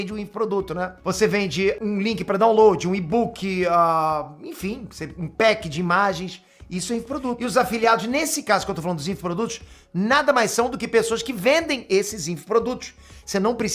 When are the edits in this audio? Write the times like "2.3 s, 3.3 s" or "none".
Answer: none